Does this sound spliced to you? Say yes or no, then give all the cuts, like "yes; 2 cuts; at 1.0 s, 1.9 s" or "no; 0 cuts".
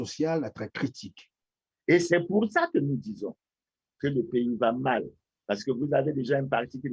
yes; 1 cut; at 1.7 s